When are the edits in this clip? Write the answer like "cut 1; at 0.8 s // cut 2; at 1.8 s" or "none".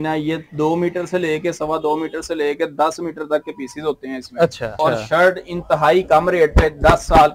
cut 1; at 4.8 s